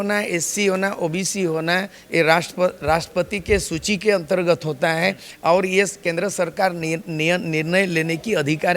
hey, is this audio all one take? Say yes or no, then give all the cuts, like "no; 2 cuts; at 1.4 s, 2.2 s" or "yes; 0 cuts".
yes; 0 cuts